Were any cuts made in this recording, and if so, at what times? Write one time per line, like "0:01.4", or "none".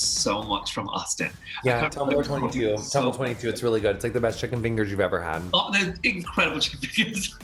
none